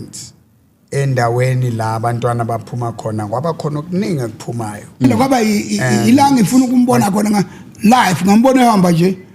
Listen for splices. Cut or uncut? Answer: cut